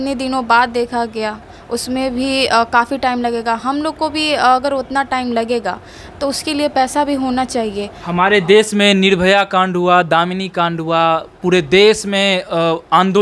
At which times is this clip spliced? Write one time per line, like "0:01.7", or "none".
none

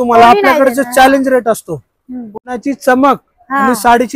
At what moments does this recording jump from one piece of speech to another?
0:02.4

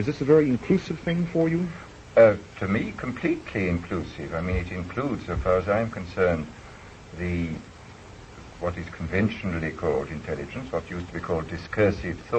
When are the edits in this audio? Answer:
0:04.7

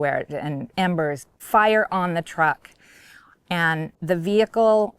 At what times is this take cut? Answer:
0:01.3
0:04.0

